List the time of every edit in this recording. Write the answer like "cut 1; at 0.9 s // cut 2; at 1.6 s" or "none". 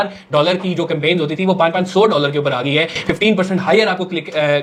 none